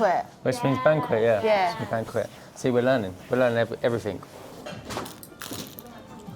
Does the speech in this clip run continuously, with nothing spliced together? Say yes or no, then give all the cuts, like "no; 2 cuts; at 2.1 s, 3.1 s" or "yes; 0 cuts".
no; 1 cut; at 4.4 s